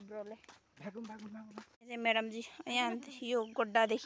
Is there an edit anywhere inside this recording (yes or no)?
yes